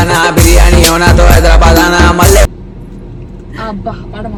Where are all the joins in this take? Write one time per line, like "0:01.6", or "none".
none